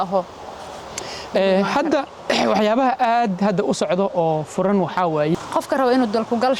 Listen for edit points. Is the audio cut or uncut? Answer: cut